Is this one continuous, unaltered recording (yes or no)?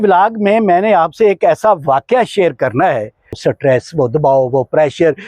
no